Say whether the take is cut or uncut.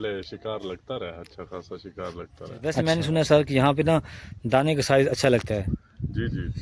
cut